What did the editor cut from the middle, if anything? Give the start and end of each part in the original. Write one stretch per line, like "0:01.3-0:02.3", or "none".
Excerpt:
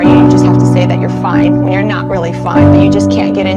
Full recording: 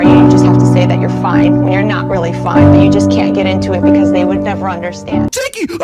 none